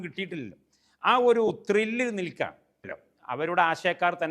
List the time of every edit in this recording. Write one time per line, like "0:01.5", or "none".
0:03.0